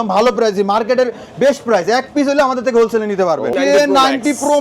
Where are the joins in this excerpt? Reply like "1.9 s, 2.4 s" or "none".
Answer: 3.5 s